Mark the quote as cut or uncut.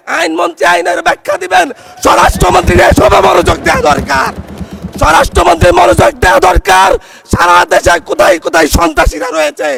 uncut